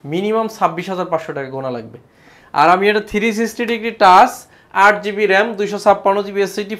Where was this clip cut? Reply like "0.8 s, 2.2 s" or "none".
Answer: none